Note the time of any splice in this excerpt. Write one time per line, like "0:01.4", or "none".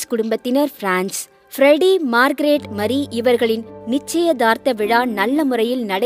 none